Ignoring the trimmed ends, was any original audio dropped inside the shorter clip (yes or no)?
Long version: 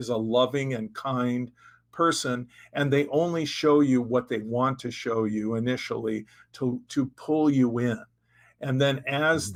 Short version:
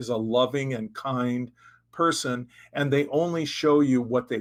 no